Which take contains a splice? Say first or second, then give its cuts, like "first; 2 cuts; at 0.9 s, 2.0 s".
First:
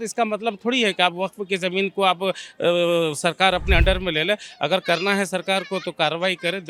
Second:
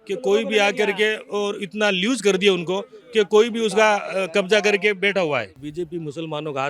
second; 1 cut; at 5.6 s